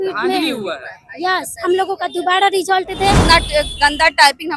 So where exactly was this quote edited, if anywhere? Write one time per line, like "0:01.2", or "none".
0:03.2